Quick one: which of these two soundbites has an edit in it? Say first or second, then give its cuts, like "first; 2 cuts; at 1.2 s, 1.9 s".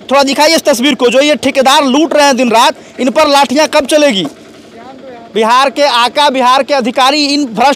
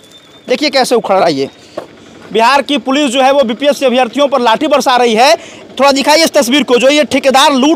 second; 1 cut; at 1.8 s